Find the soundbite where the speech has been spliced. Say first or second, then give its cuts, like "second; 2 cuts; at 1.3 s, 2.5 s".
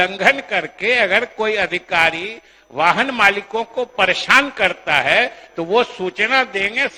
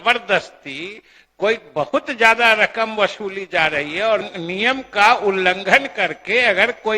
second; 1 cut; at 4.3 s